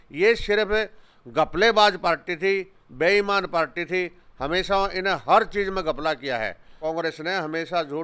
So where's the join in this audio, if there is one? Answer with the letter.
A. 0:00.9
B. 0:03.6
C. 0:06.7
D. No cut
C